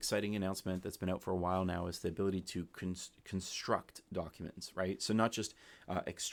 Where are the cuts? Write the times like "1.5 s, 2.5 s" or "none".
none